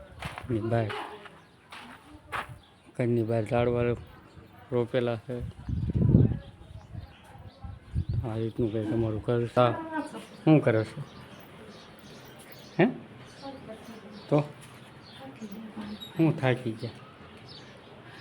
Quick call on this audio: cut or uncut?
cut